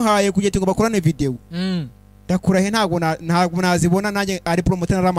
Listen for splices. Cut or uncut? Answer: uncut